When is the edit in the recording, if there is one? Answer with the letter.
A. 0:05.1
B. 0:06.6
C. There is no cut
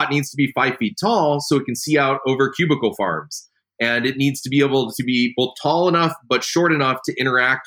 C